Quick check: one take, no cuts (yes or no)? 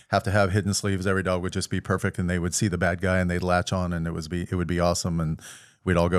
yes